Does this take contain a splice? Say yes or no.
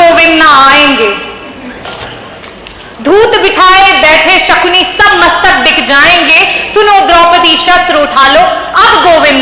no